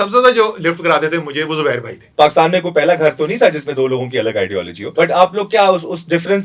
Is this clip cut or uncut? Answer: cut